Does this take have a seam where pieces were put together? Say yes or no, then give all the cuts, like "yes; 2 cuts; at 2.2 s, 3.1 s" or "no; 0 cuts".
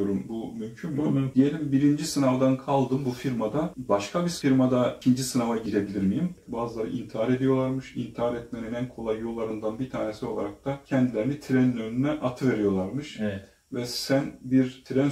yes; 2 cuts; at 1.3 s, 6.3 s